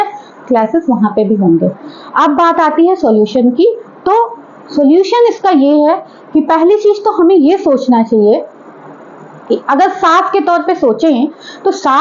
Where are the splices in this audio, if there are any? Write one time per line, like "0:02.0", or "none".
none